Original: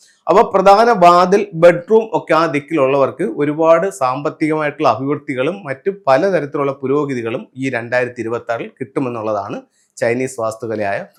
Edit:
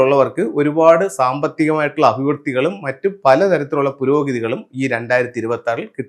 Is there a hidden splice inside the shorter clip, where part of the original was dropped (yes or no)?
no